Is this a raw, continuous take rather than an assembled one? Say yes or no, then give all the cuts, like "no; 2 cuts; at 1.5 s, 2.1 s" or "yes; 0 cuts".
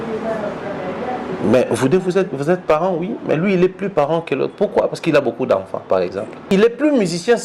no; 1 cut; at 6.4 s